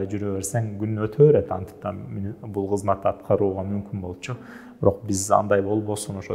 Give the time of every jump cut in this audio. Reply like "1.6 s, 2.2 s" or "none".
none